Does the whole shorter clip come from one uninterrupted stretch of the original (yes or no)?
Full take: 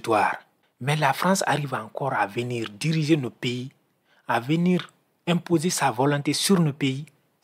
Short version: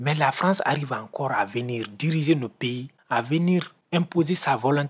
no